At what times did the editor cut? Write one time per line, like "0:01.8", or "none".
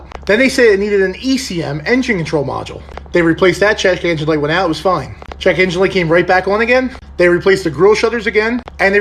none